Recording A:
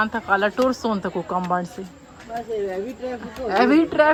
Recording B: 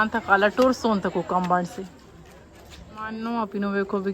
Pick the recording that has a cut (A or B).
B